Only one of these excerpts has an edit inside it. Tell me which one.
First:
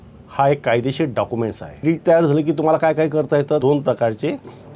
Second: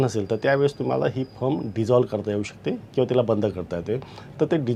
first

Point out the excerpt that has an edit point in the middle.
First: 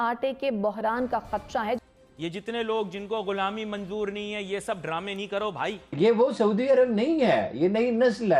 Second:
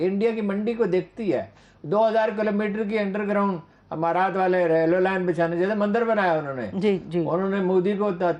first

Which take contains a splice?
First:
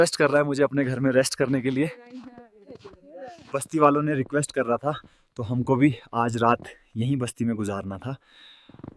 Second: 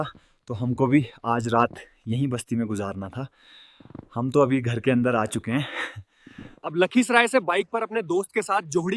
second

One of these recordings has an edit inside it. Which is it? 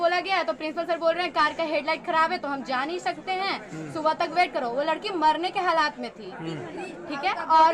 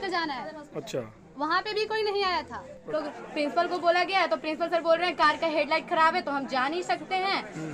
second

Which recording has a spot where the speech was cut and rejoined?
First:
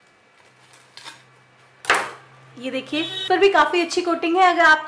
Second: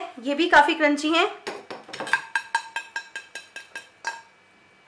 first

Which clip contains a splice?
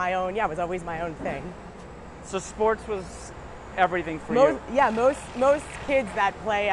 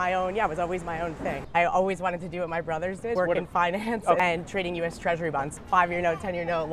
second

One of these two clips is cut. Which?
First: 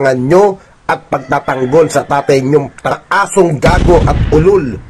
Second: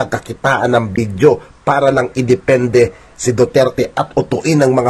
first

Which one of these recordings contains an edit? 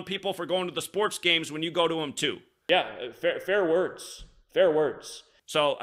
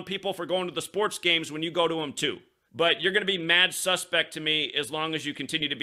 second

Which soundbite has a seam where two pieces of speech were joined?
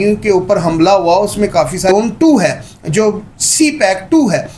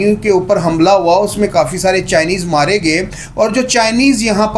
first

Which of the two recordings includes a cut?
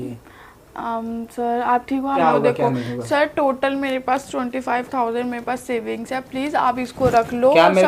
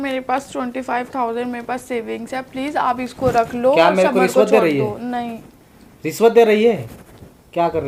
first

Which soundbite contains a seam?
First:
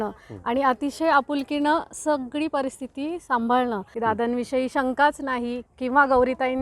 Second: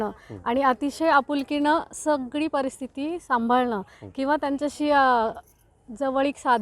first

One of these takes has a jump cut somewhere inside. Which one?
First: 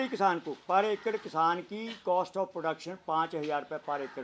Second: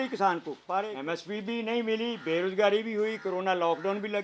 second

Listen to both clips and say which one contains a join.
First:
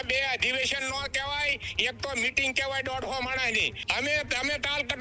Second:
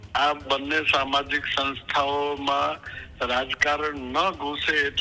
first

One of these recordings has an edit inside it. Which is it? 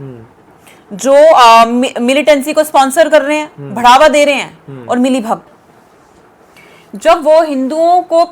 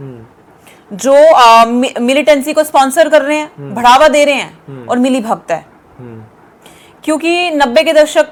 first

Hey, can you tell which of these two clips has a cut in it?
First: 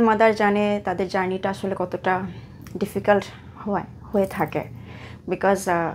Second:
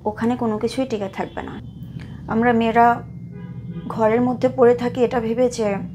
second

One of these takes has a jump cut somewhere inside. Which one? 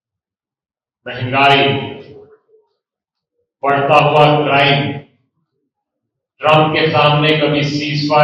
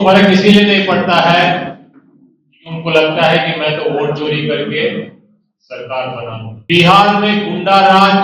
second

